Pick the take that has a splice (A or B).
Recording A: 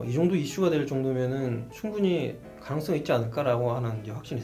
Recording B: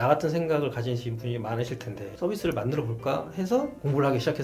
B